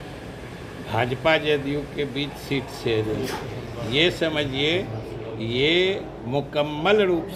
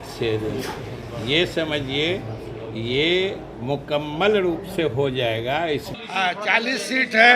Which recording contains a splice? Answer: second; 1 cut; at 5.9 s

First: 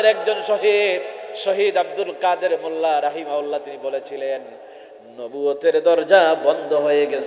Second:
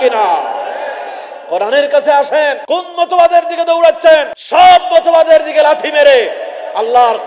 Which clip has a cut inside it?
second; 2 cuts; at 2.6 s, 4.4 s

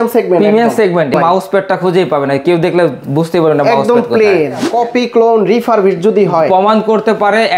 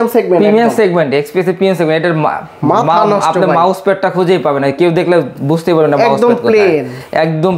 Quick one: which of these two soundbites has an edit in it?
first; 2 cuts; at 1.1 s, 4.7 s

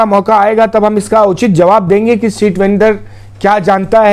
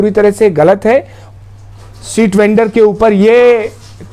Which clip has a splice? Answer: second; 1 cut; at 1.3 s

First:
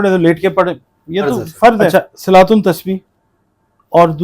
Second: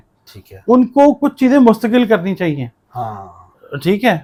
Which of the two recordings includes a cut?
first; 1 cut; at 1.9 s

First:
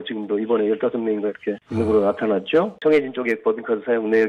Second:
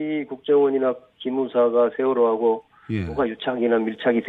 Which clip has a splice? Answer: first; 2 cuts; at 1.6 s, 2.7 s

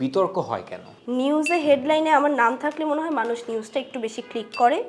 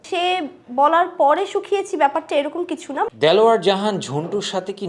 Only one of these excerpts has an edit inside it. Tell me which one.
second; 1 cut; at 3.1 s

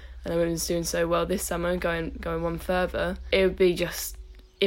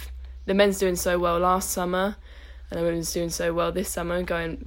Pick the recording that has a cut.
first; 1 cut; at 3.2 s

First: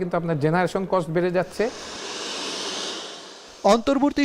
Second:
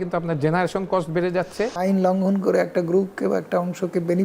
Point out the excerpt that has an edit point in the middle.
second; 1 cut; at 1.7 s

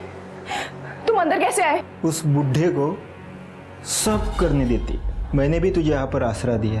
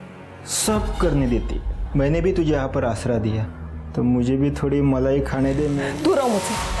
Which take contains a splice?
second; 1 cut; at 5.9 s

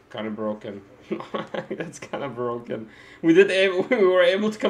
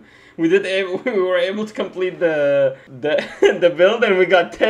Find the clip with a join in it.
second; 1 cut; at 2.9 s

